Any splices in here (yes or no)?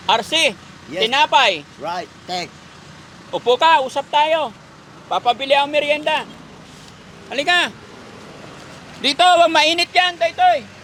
no